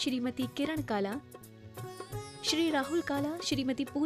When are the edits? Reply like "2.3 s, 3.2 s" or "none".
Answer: 1.2 s